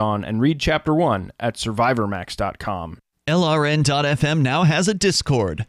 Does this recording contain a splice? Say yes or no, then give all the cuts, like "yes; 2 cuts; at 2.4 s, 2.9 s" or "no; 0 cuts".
yes; 1 cut; at 2.9 s